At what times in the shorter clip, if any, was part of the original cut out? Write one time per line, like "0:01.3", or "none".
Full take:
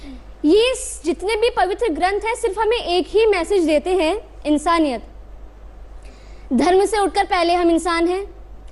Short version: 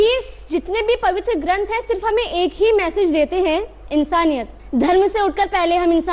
0:04.6